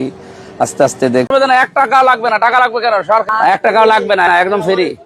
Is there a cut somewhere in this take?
yes; 1 cut; at 1.3 s

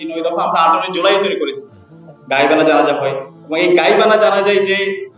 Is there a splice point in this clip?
yes; 1 cut; at 2.1 s

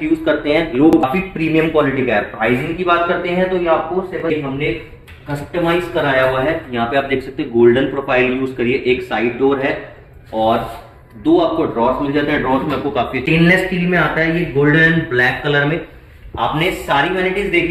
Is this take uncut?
no; 3 cuts; at 1.0 s, 4.2 s, 13.2 s

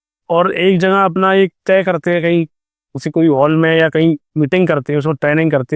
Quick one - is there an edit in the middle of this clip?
no; 0 cuts

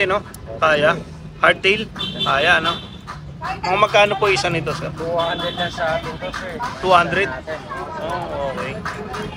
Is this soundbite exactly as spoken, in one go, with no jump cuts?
yes; 0 cuts

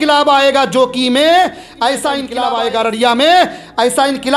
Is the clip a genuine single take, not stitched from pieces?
no; 1 cut; at 2.3 s

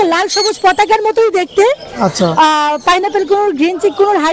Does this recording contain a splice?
no; 0 cuts

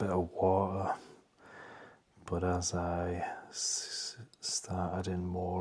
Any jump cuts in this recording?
no; 0 cuts

